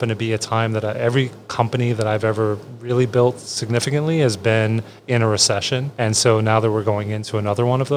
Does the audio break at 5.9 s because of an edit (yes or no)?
yes